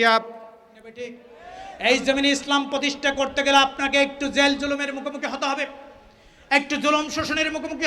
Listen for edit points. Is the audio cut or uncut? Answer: cut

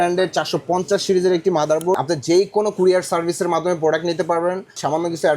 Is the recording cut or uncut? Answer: cut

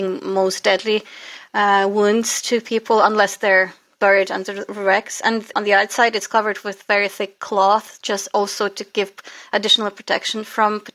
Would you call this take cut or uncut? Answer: cut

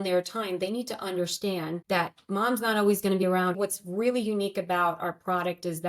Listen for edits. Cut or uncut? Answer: cut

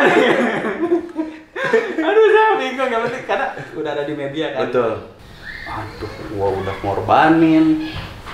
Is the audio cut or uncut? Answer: cut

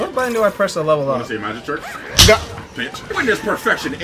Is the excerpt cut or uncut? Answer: cut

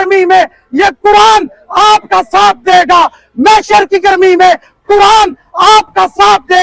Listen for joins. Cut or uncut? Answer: uncut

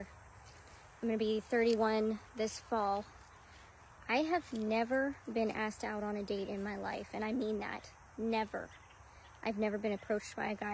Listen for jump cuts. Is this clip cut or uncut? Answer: uncut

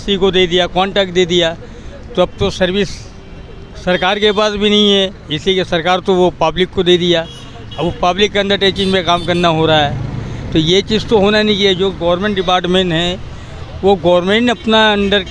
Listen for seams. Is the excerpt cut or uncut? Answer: uncut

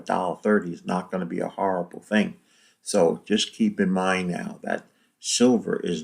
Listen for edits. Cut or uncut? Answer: uncut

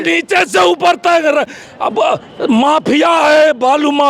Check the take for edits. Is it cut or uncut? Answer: uncut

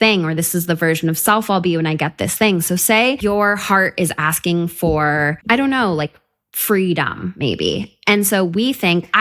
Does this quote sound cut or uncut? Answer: cut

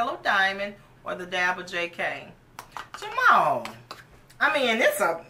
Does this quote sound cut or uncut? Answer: uncut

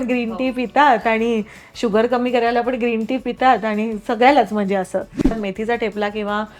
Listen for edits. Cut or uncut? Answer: cut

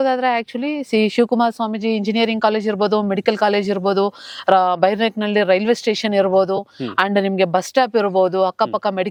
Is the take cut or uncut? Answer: uncut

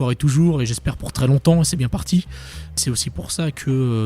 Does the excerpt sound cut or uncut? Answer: cut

